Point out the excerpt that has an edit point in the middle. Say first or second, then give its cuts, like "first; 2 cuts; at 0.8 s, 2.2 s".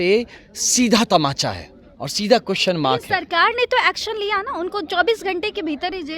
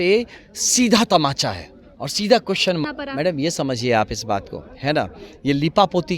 second; 1 cut; at 2.8 s